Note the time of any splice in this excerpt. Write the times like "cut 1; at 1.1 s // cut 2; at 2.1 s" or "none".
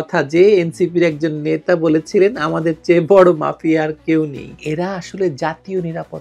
cut 1; at 4.6 s